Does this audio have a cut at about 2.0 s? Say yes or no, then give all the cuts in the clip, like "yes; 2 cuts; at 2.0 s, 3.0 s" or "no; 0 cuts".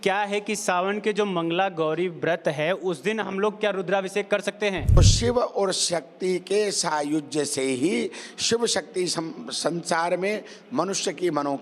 no; 1 cut; at 5.0 s